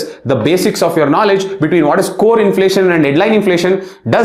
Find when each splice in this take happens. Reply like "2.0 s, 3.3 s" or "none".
none